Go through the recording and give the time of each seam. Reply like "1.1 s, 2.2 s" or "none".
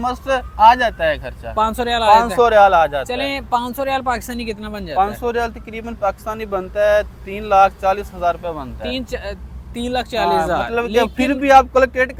none